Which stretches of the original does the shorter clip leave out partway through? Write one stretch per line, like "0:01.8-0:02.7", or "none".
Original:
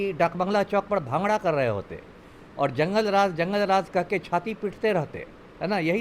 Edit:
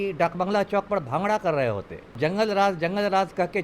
0:02.2-0:02.7